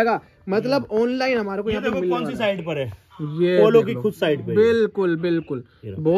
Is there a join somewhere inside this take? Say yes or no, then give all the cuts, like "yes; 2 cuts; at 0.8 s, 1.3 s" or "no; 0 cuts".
no; 0 cuts